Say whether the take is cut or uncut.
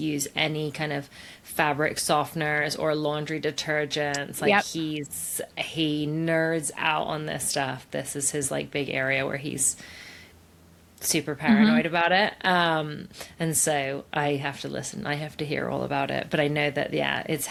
uncut